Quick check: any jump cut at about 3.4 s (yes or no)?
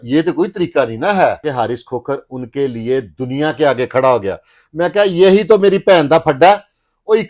no